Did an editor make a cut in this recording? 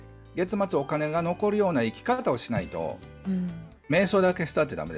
no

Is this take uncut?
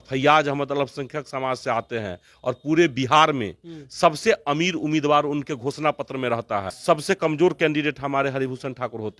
no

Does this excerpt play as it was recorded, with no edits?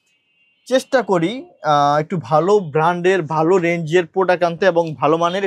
yes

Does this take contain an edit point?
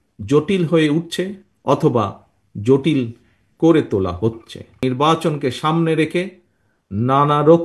yes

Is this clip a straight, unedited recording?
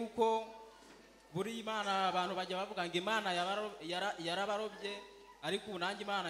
yes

